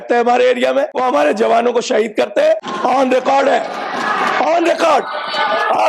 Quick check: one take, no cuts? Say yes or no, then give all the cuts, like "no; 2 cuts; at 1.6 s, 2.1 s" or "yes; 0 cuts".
no; 2 cuts; at 0.9 s, 2.7 s